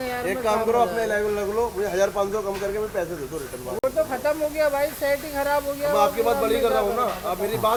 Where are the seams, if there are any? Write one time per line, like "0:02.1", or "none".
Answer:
none